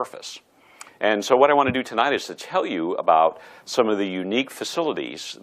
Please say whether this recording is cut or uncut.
cut